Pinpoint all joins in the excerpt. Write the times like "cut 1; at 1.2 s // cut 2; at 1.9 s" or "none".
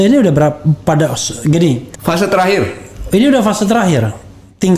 cut 1; at 1.9 s